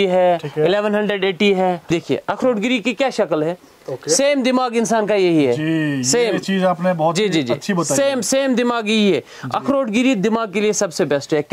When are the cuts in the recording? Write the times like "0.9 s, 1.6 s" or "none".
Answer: 1.9 s